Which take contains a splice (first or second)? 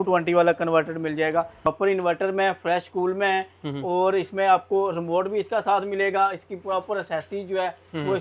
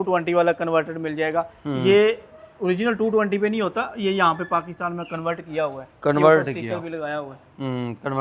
first